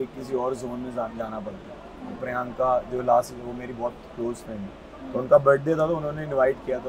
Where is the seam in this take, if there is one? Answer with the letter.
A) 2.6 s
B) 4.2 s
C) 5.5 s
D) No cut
D